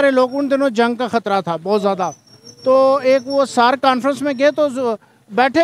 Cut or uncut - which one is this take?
uncut